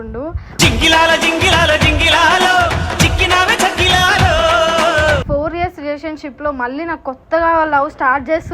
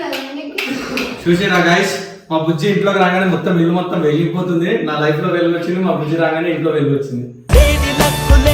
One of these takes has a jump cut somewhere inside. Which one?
first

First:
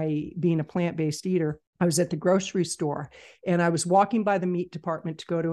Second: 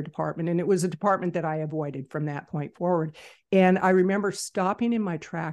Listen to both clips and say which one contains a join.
first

